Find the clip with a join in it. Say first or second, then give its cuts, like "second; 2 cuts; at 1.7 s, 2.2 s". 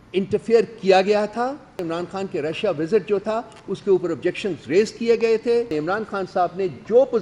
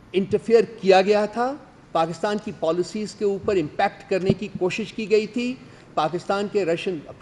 first; 2 cuts; at 1.8 s, 5.7 s